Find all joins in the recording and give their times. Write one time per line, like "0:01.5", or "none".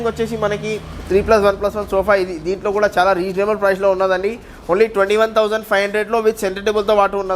none